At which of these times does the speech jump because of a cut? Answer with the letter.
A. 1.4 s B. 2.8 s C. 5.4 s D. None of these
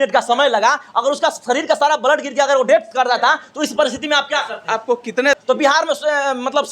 C